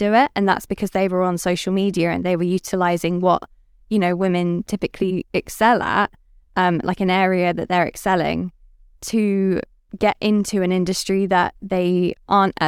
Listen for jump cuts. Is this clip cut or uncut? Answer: cut